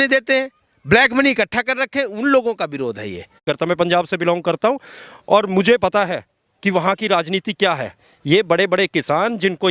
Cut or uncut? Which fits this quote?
cut